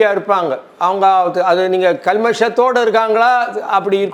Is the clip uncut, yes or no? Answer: yes